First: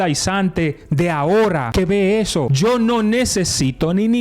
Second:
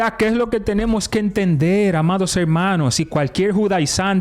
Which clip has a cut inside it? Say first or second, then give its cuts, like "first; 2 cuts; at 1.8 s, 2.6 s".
first; 2 cuts; at 1.7 s, 2.5 s